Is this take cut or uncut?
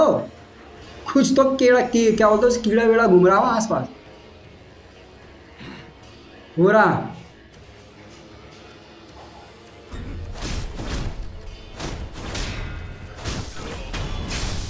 uncut